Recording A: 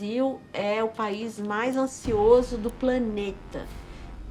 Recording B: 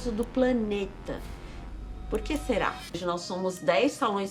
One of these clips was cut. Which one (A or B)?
B